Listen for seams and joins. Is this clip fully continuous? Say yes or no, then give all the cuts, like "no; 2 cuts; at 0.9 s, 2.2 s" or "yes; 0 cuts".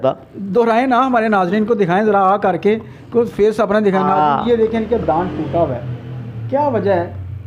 yes; 0 cuts